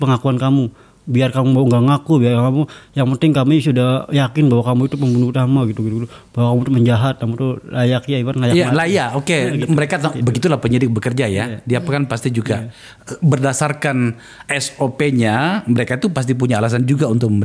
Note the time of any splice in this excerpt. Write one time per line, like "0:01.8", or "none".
none